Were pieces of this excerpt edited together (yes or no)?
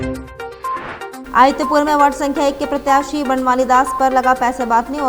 no